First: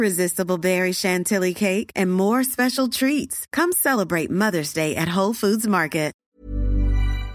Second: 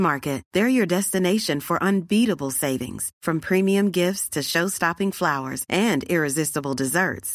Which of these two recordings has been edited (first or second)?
first